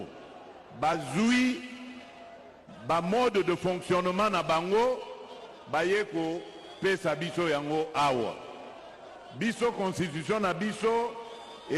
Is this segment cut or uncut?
uncut